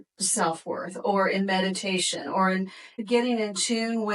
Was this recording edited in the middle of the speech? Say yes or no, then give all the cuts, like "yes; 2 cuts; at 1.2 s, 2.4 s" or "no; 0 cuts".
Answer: yes; 1 cut; at 2.9 s